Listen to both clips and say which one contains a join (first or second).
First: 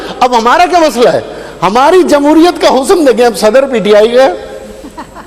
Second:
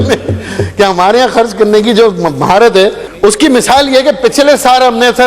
second